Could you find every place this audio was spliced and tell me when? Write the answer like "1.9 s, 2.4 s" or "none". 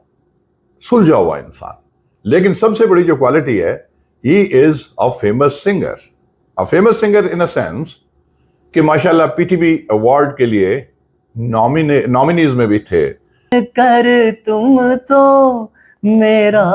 13.5 s